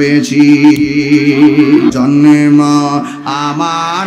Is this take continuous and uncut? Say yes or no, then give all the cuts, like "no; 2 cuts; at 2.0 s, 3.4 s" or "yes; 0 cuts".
no; 1 cut; at 1.9 s